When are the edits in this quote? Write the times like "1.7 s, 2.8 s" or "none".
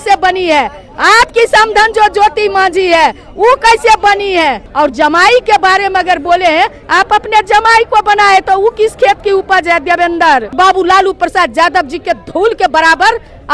4.6 s, 10.5 s